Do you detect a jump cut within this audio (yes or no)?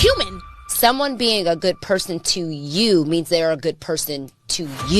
yes